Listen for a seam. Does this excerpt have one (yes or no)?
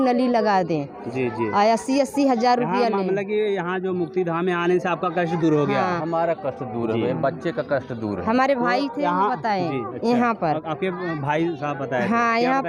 no